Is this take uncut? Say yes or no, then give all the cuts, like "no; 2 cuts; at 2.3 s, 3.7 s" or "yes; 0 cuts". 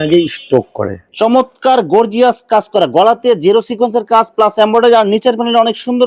no; 1 cut; at 1.0 s